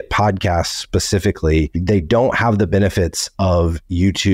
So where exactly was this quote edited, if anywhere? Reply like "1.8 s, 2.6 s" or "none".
1.6 s